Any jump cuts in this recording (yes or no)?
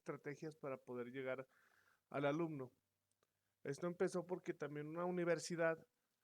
yes